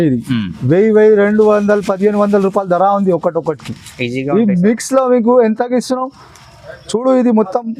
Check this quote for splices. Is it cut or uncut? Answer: uncut